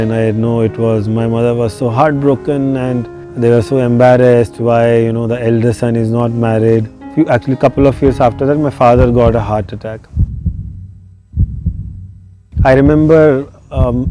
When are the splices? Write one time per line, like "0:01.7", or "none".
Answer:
0:10.1
0:12.5